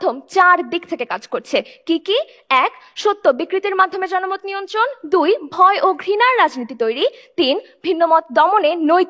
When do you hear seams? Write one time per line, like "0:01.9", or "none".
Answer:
none